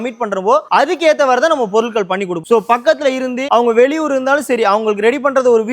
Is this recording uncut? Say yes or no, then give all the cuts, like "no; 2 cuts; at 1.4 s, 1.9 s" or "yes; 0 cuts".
no; 1 cut; at 2.4 s